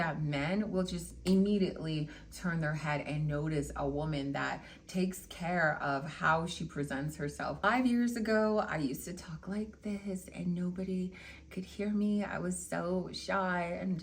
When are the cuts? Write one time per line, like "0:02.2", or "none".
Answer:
0:07.6